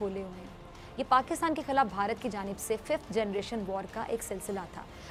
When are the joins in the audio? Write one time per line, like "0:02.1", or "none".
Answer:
none